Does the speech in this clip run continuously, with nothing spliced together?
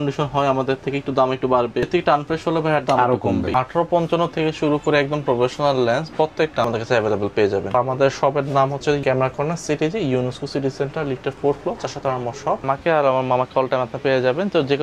no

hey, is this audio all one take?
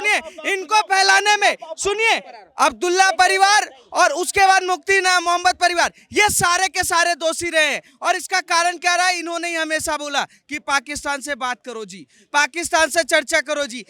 yes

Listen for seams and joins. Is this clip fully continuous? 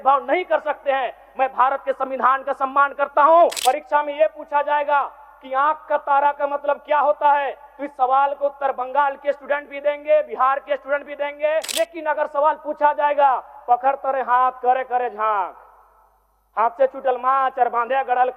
no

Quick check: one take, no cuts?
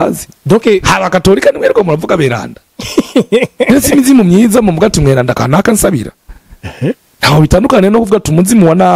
yes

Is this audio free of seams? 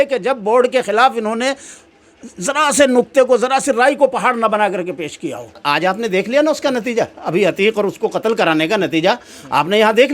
no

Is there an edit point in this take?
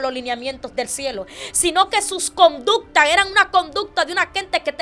no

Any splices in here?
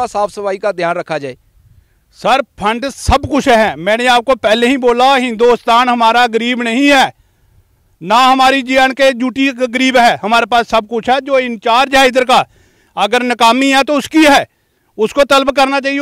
no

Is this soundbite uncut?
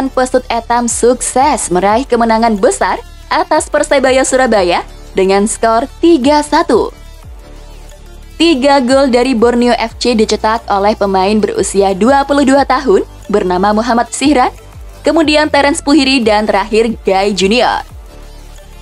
no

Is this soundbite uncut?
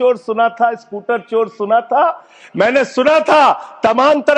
yes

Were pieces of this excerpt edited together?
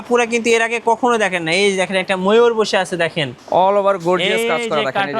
yes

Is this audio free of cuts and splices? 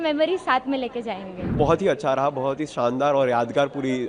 no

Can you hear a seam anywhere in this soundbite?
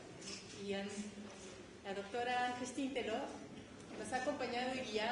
no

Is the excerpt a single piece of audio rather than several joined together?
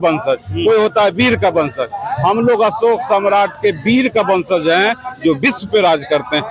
yes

